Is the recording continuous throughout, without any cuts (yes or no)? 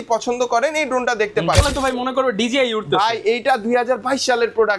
no